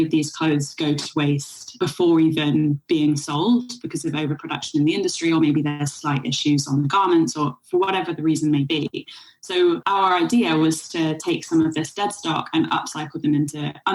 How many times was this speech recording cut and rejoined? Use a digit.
2